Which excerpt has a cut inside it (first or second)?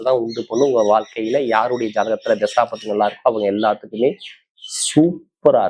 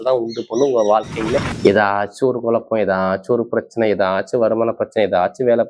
second